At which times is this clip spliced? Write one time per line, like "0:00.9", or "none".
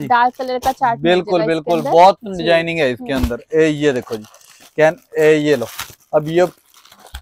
none

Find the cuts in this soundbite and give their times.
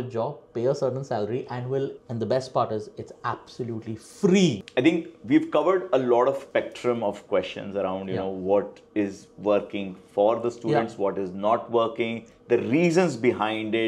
0:02.0
0:04.6
0:06.4

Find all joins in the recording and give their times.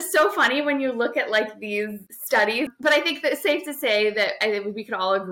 0:02.5

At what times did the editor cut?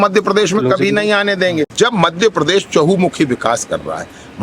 0:01.7

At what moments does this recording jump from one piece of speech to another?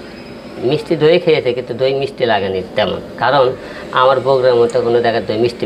none

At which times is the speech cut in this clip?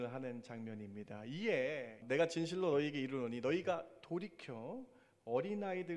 0:02.0

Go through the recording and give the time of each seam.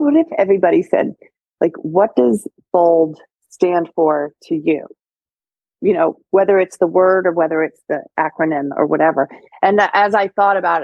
none

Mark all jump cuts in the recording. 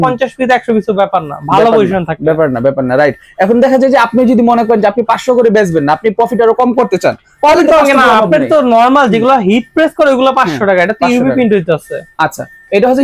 none

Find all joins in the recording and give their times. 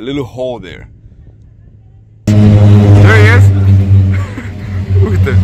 0:02.3

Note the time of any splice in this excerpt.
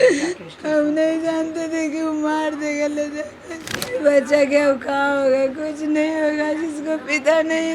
0:03.9

